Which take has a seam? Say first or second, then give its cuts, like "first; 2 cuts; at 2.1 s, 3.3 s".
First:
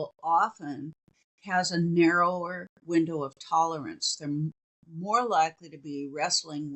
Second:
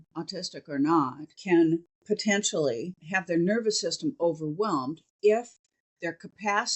second; 3 cuts; at 1.3 s, 1.9 s, 3.0 s